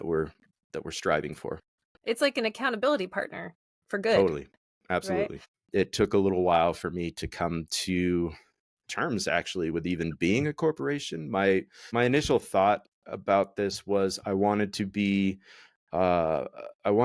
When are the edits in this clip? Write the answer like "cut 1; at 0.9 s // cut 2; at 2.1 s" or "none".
none